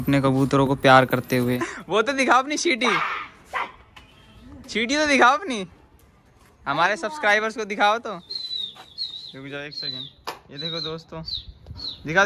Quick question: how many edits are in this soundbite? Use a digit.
1